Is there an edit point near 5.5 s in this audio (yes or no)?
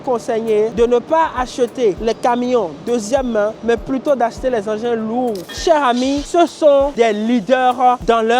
yes